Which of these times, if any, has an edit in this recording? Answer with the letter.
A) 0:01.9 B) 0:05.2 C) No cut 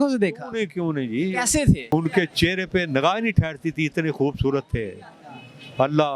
A